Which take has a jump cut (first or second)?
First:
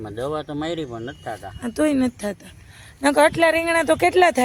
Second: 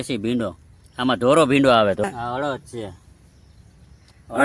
second